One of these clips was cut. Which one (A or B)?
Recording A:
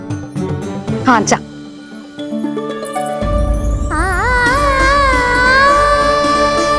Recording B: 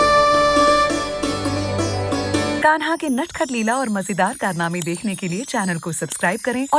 B